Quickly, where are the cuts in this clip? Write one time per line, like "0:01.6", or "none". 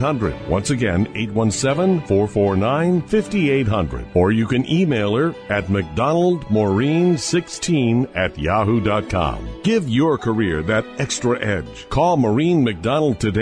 none